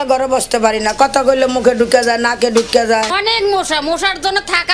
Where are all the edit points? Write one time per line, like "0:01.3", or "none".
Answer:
0:03.1